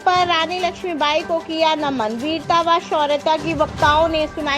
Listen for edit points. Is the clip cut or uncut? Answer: uncut